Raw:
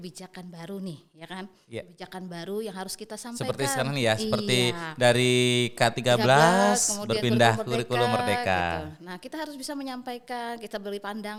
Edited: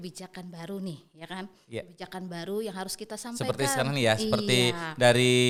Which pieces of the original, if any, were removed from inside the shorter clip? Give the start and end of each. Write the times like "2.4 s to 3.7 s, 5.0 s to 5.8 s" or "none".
none

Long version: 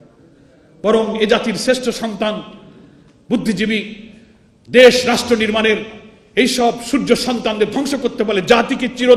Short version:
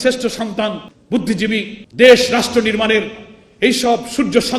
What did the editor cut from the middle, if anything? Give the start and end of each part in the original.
2.5 s to 3.1 s, 4.0 s to 4.5 s

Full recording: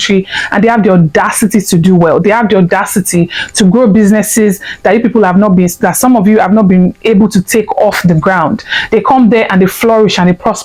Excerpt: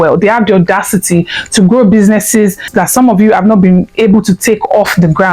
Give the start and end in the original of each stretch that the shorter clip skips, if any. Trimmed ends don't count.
4.7 s to 5.7 s

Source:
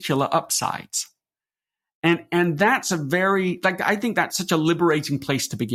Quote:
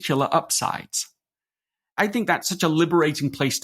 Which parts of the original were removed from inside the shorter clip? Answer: 1.9 s to 3.8 s

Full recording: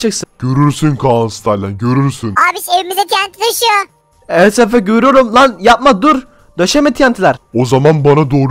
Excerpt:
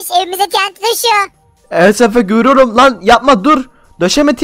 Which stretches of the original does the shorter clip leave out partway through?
none

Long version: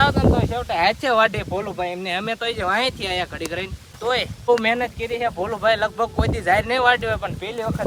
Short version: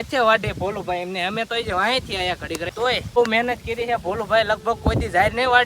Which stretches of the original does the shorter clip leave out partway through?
3.9 s to 4.3 s

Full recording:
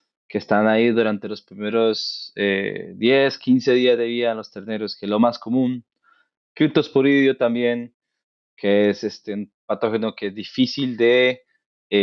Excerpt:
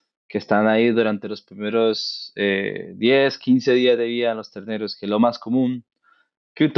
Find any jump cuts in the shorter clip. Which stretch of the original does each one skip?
none

